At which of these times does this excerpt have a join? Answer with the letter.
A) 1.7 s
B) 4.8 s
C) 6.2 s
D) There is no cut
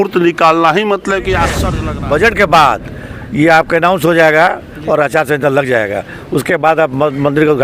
A